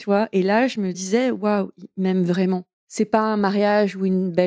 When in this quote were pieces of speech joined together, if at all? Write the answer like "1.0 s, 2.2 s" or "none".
1.0 s, 2.8 s